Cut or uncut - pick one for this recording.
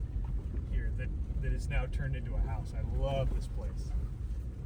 uncut